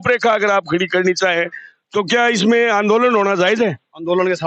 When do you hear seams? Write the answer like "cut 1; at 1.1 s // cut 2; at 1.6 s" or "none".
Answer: none